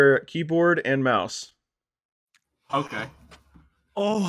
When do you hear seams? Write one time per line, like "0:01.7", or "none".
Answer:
none